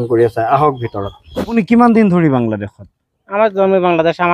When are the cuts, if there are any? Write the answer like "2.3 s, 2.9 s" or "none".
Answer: 1.6 s